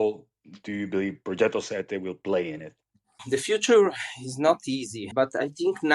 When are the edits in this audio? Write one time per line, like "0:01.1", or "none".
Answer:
0:05.0